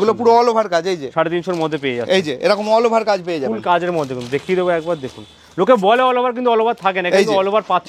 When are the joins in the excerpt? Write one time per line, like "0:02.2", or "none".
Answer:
none